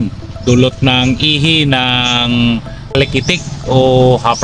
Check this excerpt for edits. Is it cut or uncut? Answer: cut